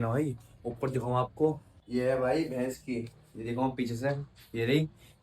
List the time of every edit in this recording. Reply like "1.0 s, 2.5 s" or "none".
1.7 s

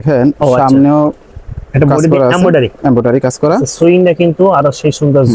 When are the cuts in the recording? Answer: none

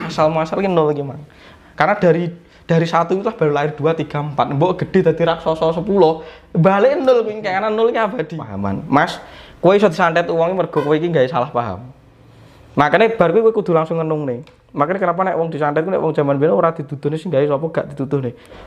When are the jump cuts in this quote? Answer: 8.6 s

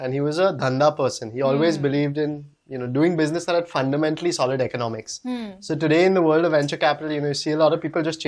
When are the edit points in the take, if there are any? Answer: none

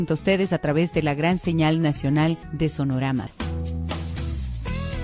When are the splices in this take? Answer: 3.0 s

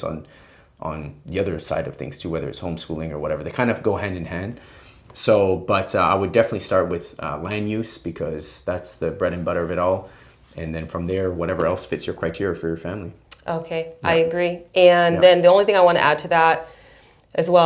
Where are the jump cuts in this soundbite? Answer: none

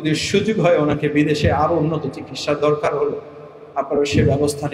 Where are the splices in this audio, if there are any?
none

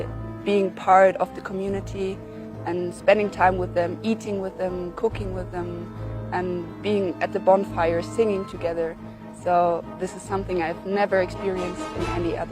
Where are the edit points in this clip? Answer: none

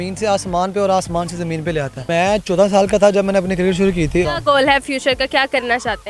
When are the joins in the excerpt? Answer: 2.1 s, 4.2 s

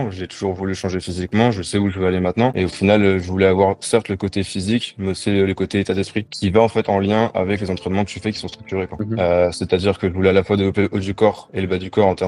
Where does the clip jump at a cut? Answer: 2.5 s, 6.4 s, 9.0 s

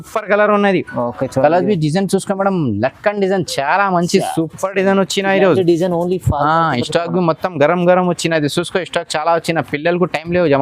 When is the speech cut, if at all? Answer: none

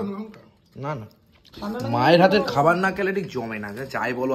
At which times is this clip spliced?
1.4 s

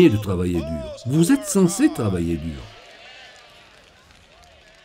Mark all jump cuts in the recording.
2.6 s

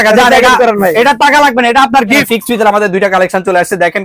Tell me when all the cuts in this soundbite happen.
2.2 s

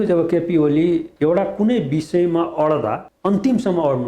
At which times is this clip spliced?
1.1 s, 3.1 s

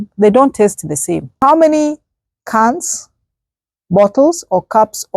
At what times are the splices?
1.4 s

